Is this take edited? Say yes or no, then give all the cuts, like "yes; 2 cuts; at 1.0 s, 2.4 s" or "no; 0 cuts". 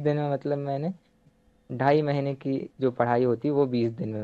yes; 1 cut; at 1.2 s